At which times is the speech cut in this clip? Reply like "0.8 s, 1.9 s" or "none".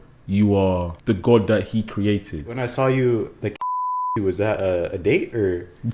0.9 s, 2.6 s

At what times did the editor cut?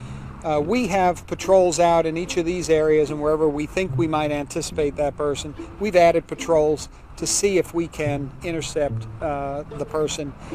8.7 s

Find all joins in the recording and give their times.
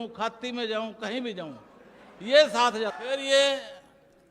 3.0 s

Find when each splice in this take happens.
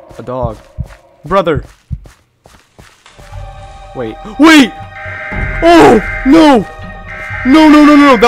1.9 s

